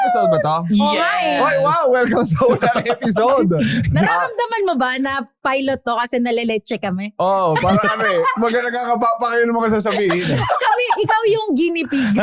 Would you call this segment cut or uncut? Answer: uncut